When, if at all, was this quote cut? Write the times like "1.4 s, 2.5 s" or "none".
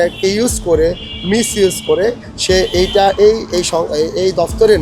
none